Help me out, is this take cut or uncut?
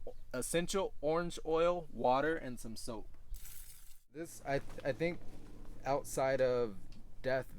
cut